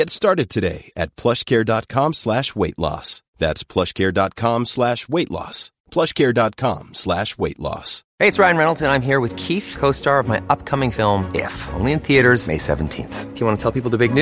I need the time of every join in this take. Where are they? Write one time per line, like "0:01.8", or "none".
0:08.0